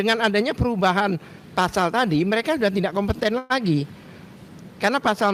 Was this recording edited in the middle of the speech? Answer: no; 0 cuts

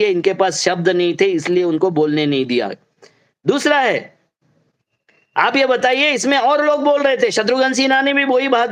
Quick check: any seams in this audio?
no; 0 cuts

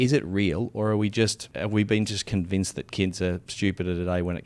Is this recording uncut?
no; 2 cuts; at 1.4 s, 3.5 s

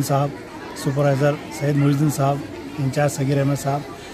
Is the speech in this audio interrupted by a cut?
no; 0 cuts

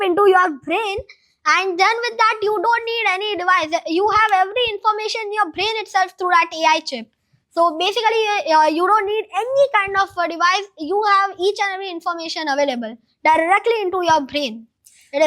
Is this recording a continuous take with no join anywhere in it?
yes; 0 cuts

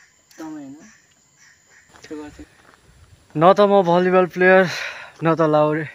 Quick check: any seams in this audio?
yes; 1 cut; at 2.5 s

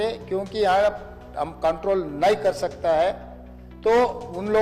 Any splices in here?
no; 0 cuts

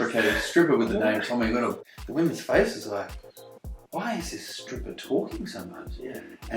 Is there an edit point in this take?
yes; 1 cut; at 1.9 s

